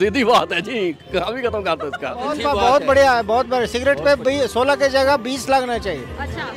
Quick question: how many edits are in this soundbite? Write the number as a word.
one